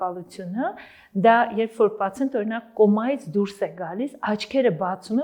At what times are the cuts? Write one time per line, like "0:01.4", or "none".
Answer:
none